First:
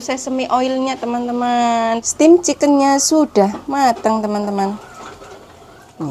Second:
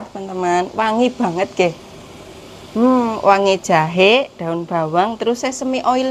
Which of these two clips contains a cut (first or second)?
first